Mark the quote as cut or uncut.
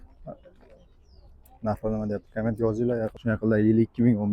cut